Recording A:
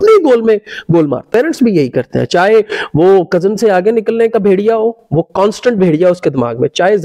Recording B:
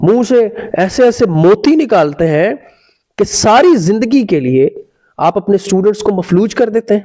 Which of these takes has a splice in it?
A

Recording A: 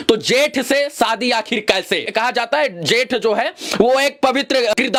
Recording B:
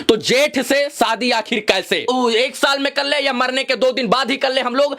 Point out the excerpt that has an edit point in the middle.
B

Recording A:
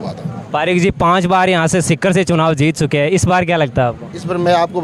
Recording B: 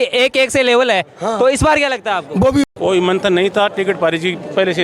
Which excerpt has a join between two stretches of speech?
B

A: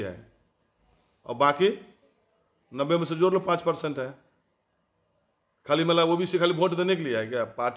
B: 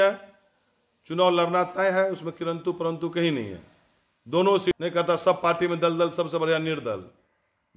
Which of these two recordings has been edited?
B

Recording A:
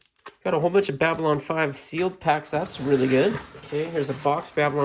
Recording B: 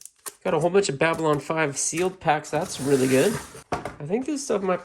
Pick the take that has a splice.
B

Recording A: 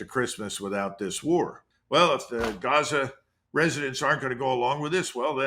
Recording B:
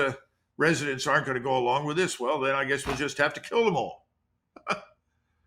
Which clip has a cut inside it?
A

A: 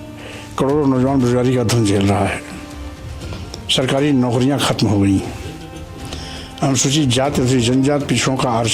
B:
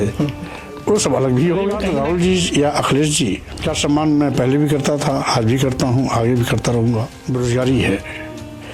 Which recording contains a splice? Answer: B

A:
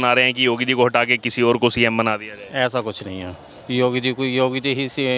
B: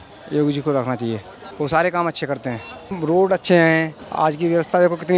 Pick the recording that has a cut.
B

